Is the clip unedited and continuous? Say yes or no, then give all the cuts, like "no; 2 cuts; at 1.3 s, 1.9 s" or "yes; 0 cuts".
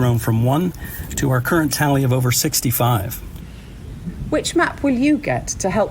no; 1 cut; at 3.5 s